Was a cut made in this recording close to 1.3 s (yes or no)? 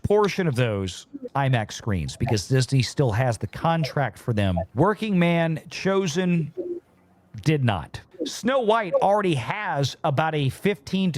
yes